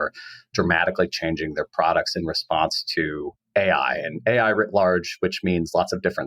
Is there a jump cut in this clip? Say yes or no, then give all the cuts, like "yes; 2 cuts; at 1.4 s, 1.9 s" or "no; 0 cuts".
yes; 1 cut; at 3.3 s